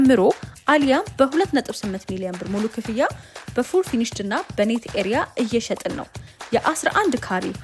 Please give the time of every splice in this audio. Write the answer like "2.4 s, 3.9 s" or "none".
none